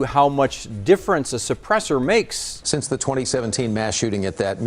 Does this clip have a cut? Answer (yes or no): yes